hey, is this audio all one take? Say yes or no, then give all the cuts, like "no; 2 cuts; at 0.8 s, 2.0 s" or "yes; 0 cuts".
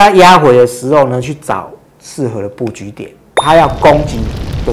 no; 1 cut; at 3.4 s